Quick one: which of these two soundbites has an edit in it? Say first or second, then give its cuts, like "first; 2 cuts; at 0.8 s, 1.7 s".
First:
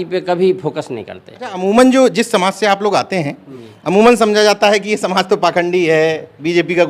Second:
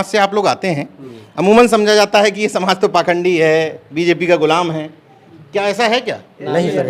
first; 1 cut; at 1.6 s